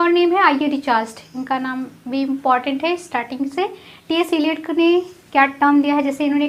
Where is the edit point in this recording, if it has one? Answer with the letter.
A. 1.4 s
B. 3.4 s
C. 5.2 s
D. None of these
D